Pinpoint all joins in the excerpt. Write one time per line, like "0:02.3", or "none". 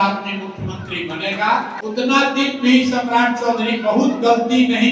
0:01.8